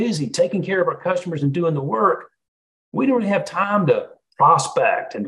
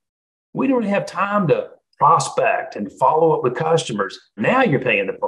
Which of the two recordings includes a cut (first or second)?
second